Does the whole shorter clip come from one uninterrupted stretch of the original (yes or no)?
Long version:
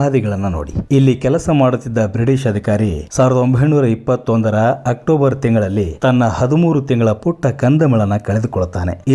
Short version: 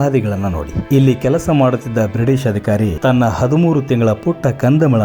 no